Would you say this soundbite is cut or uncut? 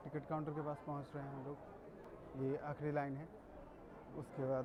uncut